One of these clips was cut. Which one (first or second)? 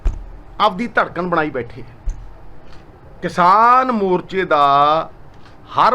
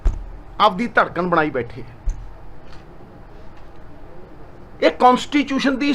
first